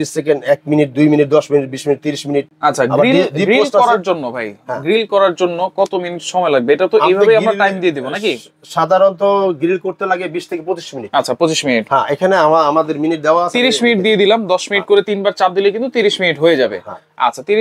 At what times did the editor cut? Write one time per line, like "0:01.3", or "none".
none